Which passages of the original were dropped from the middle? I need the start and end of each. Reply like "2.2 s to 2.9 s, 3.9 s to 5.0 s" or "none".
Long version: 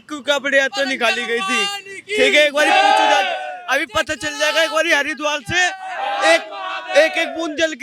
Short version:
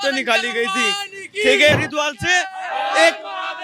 2.5 s to 5.0 s

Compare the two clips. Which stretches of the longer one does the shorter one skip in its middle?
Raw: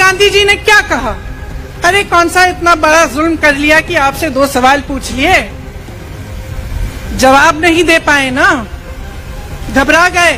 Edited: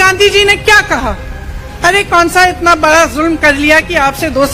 none

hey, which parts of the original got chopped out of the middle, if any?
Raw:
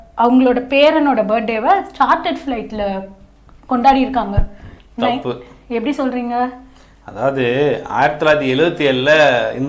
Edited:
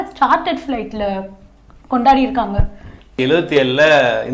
4.9 s to 8.4 s

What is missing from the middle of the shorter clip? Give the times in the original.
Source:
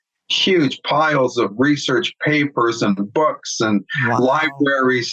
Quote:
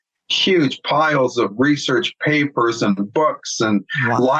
none

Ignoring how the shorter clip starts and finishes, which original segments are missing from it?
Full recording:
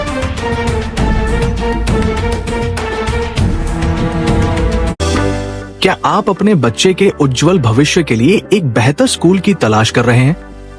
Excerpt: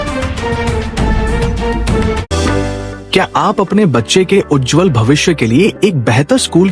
2.2 s to 4.9 s

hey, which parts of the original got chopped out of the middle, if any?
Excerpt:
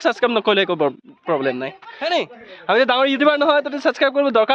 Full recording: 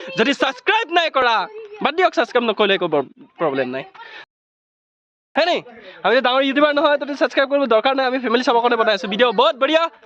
4.2 s to 5.4 s

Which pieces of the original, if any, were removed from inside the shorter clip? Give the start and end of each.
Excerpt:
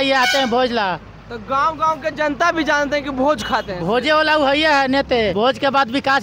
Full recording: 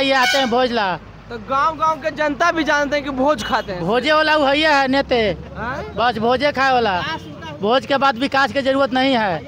5.3 s to 7.6 s

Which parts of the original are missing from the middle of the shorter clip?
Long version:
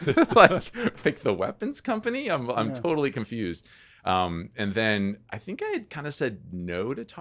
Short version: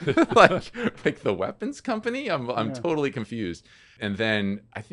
3.9 s to 4.4 s

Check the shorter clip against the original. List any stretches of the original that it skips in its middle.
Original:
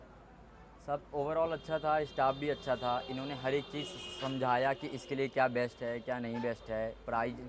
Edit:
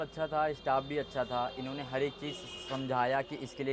none

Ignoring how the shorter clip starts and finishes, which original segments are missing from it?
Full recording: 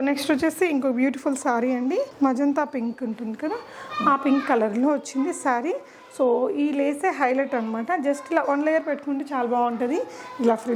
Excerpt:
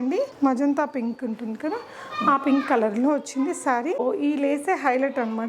5.8 s to 6.4 s

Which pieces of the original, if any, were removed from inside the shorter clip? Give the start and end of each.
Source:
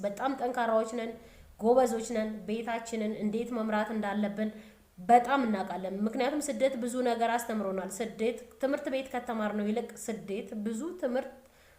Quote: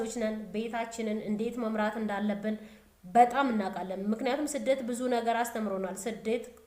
none

